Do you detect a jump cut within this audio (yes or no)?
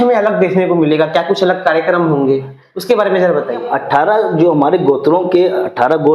yes